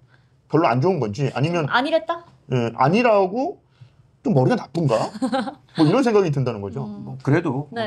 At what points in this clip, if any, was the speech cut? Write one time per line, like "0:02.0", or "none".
none